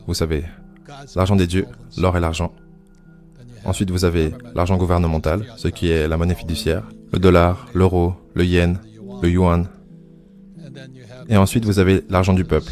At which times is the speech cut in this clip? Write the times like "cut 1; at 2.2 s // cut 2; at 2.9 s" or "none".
none